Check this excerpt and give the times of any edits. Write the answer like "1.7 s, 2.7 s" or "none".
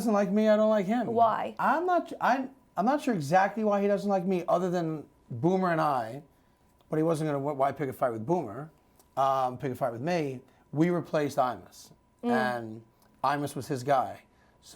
1.5 s